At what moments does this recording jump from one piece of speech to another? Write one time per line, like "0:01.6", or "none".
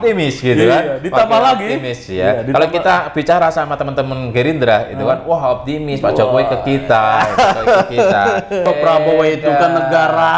0:08.7